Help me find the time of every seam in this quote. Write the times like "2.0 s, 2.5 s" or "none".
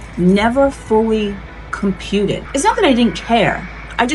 2.4 s